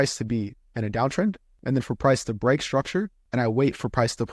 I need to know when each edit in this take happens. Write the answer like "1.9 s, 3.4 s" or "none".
1.5 s, 3.2 s